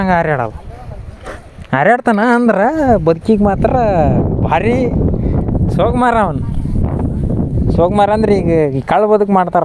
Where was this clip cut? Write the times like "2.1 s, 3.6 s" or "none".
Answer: none